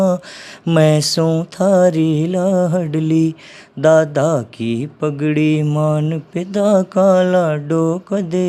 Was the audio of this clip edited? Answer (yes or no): no